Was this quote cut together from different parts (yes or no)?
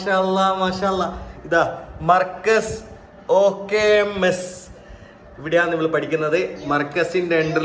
no